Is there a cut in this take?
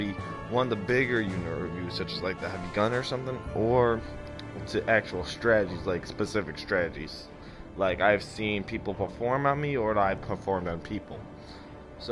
no; 0 cuts

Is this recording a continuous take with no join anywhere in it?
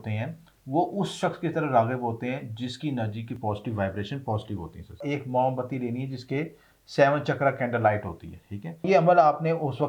no; 2 cuts; at 5.0 s, 8.9 s

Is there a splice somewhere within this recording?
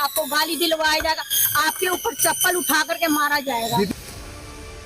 yes; 1 cut; at 4.0 s

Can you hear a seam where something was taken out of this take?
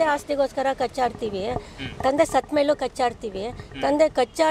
no; 0 cuts

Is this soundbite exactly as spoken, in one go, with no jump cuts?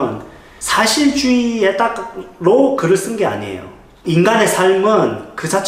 yes; 0 cuts

